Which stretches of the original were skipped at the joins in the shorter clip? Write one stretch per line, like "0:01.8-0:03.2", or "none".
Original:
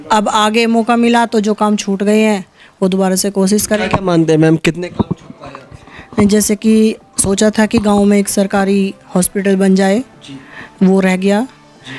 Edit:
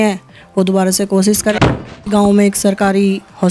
0:04.1-0:07.6